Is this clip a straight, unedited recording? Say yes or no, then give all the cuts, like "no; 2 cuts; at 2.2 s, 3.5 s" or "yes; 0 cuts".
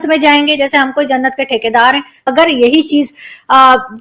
no; 1 cut; at 2.2 s